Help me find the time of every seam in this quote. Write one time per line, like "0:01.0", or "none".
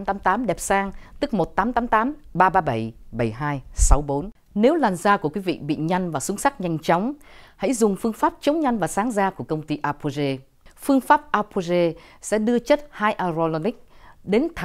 0:04.4

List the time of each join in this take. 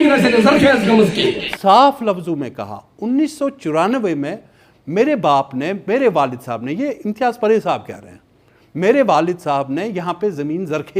0:01.5

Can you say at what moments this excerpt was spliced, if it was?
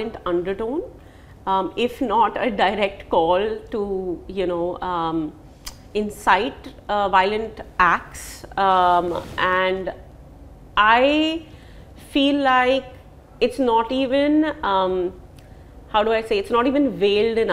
none

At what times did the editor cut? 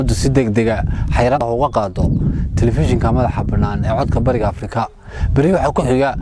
0:01.4

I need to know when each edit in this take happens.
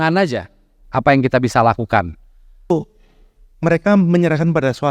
0:02.7

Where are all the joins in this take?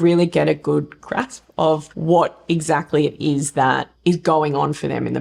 0:01.9

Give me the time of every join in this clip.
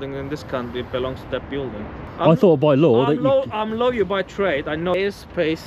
0:02.0
0:04.9

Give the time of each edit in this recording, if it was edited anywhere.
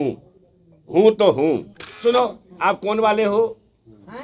0:02.0

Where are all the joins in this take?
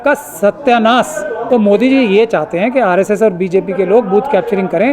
0:01.4

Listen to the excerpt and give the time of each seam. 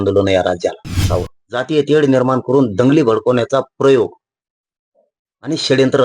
0:01.0

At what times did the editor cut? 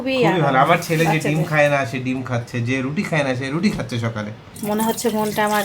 0:04.4

